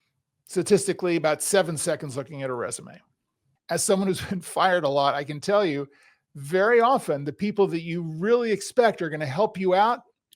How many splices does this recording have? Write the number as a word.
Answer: one